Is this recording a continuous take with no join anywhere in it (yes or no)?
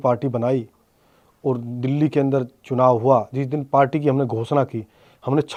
yes